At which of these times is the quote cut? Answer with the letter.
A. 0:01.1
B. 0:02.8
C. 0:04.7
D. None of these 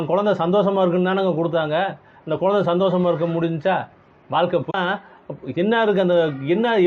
C